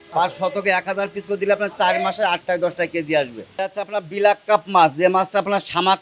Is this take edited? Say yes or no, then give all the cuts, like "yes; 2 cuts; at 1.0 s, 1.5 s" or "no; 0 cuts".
yes; 1 cut; at 3.7 s